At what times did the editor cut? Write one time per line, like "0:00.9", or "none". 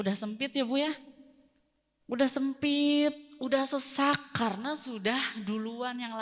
none